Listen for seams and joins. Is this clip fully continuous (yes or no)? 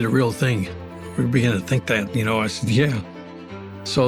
yes